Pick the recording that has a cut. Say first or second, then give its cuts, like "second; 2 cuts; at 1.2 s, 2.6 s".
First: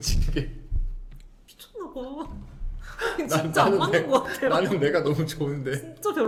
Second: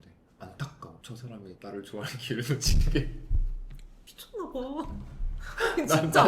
second; 1 cut; at 0.9 s